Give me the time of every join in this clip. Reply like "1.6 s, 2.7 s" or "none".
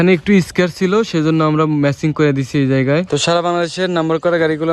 3.1 s